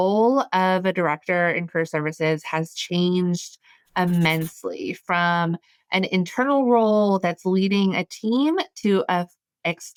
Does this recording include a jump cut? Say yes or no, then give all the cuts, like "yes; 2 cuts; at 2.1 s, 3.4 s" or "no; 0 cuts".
no; 0 cuts